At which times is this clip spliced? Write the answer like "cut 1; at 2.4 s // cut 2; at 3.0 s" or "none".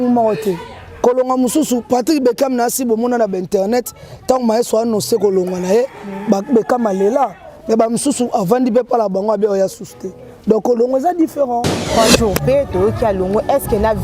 cut 1; at 11.8 s